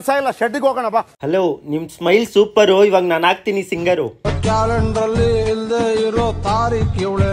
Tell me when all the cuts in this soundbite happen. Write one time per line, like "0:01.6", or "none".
0:01.1

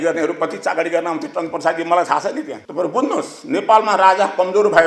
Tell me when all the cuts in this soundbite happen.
0:02.5

